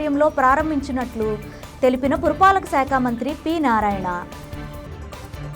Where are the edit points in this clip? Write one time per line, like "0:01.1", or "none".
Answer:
none